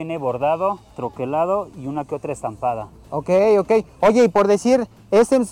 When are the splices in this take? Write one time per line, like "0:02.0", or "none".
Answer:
none